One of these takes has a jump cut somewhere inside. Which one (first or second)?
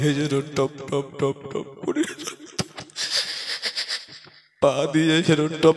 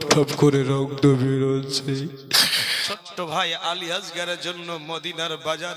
second